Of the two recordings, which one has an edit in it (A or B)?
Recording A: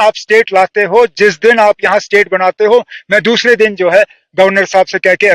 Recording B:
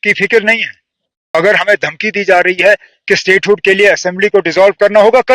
B